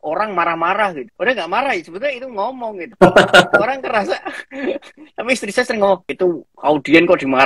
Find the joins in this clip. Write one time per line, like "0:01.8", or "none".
0:06.1